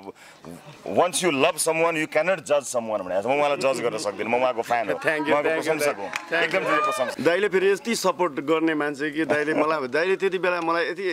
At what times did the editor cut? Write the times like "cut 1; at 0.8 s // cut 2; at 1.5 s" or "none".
cut 1; at 7.1 s